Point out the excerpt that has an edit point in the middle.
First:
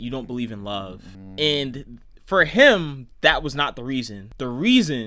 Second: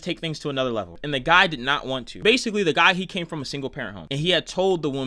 second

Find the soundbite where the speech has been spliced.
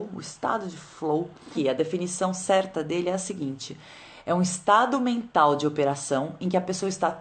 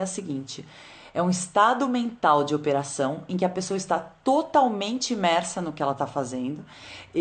first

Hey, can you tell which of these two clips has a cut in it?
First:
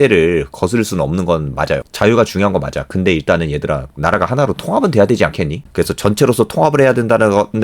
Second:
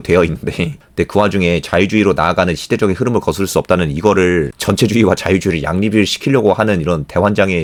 first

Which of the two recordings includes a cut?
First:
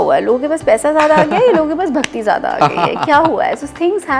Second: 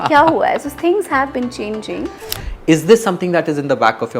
second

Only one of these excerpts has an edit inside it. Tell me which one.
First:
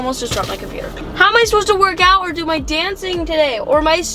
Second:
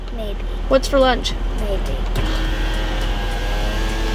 first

